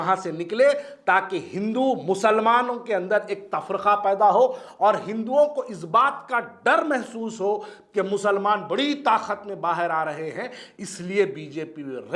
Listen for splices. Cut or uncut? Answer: uncut